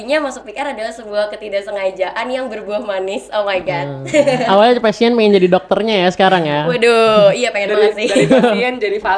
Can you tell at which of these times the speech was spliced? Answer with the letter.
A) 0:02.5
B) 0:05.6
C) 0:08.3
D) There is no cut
D